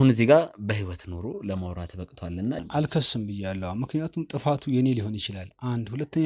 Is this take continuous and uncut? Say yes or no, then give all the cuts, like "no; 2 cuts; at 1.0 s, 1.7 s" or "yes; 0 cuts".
no; 1 cut; at 2.6 s